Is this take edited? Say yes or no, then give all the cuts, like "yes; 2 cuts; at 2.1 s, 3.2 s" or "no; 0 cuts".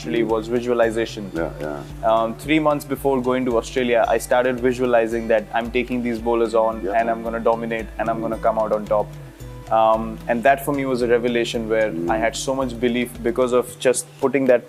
no; 0 cuts